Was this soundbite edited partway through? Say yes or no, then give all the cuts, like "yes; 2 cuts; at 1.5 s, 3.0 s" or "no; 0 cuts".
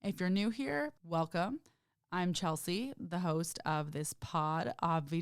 yes; 1 cut; at 1.0 s